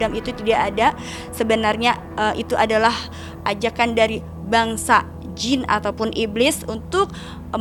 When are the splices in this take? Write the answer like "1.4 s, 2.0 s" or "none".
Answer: none